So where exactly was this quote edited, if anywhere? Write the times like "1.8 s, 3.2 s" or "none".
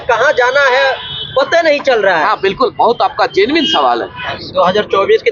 4.2 s